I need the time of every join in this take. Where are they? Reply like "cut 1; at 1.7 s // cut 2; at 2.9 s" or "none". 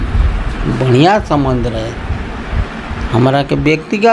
none